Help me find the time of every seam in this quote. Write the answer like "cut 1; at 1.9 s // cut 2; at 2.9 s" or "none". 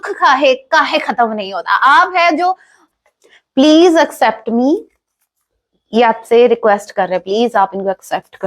cut 1; at 2.8 s